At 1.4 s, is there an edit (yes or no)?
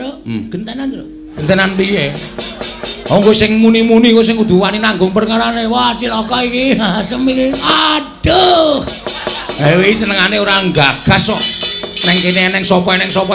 yes